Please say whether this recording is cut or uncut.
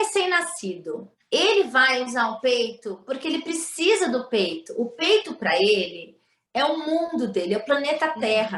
cut